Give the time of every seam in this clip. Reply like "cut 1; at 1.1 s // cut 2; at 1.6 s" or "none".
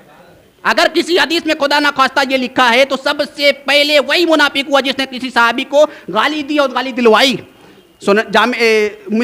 none